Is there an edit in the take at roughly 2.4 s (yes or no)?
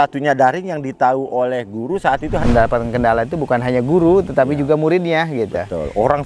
yes